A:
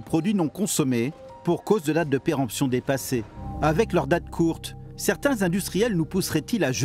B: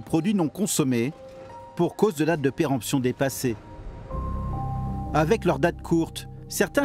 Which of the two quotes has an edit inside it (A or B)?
A